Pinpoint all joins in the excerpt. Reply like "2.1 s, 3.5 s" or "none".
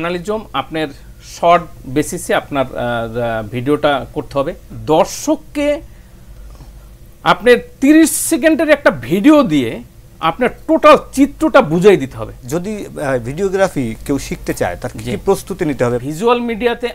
4.7 s, 12.4 s, 16.0 s